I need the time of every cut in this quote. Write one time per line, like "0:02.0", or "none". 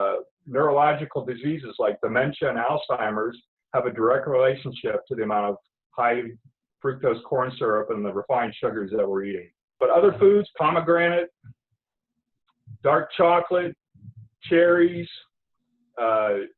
0:09.8